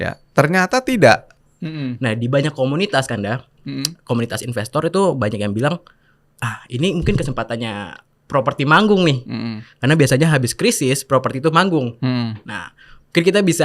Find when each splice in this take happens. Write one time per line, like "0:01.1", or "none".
0:01.3

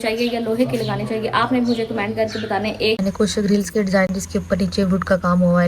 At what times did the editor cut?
0:03.0
0:04.2

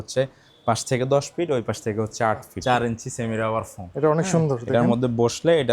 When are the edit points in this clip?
0:02.5

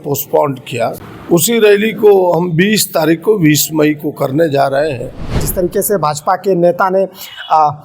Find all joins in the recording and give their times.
0:01.1
0:05.5

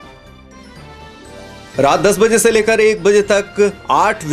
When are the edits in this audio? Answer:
0:01.3

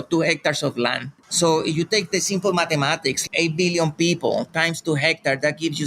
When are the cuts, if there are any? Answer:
0:01.1
0:03.2

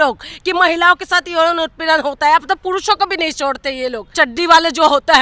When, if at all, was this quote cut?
0:04.0

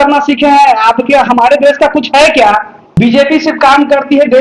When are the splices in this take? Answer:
0:02.8

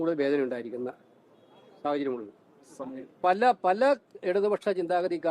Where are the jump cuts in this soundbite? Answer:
none

